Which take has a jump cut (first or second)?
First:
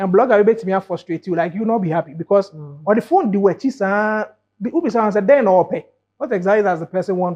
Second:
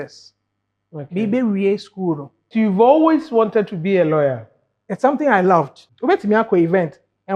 second